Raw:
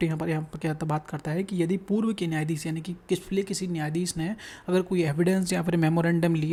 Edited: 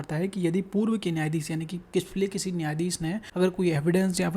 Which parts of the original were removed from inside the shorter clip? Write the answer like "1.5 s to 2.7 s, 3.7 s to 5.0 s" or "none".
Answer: 4.4 s to 4.6 s